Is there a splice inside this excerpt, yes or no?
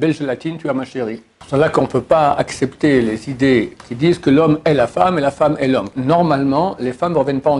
yes